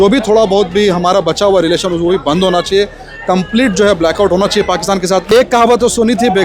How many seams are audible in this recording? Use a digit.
1